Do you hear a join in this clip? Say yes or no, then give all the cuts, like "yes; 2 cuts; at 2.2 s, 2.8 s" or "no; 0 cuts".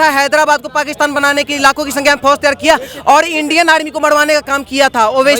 no; 0 cuts